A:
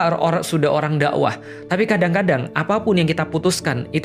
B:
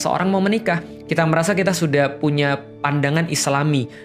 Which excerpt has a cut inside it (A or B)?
B